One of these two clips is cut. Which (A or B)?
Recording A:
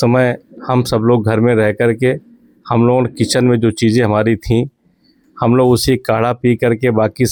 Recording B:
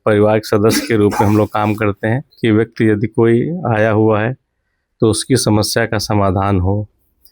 B